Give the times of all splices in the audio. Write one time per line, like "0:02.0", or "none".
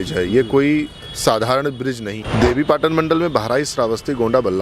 0:02.2